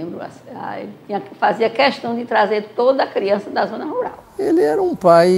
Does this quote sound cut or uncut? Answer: cut